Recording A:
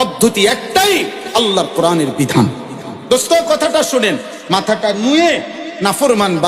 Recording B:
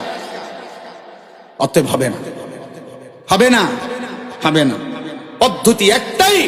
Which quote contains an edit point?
A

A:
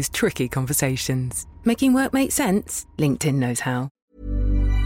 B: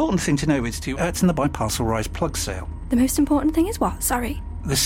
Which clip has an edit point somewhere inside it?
A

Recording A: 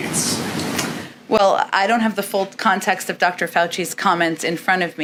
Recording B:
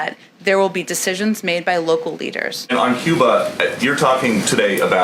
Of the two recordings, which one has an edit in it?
B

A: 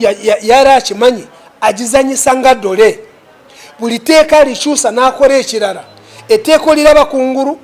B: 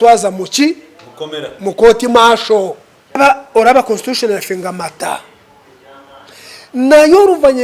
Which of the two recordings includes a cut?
B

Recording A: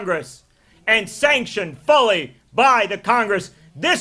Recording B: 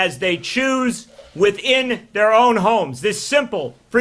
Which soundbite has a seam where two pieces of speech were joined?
B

